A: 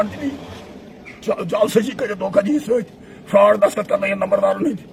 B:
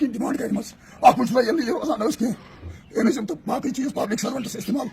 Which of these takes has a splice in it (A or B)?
B